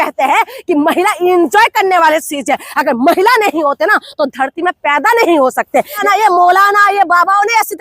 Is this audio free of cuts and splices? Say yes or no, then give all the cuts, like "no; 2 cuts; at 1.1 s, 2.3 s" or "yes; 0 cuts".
no; 1 cut; at 6.0 s